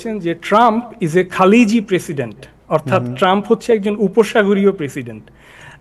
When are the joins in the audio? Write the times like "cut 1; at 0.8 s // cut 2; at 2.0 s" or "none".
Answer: none